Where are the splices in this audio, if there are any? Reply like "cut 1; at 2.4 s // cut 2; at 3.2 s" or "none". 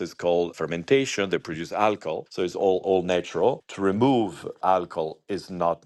none